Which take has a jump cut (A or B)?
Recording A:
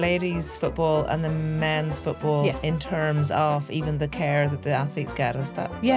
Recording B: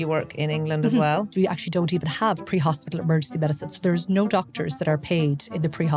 B